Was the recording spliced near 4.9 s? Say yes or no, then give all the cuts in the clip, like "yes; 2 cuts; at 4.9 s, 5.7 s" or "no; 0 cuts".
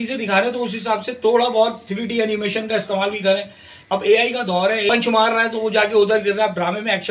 yes; 2 cuts; at 3.8 s, 4.9 s